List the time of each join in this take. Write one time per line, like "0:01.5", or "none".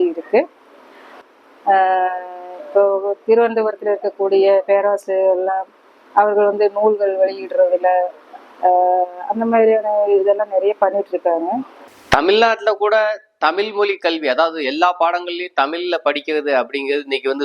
0:01.1
0:12.0